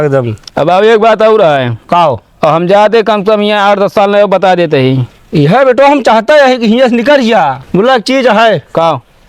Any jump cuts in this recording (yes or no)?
yes